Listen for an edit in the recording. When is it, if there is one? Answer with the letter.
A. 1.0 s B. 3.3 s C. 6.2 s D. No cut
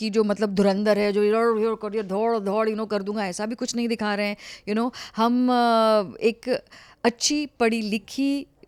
D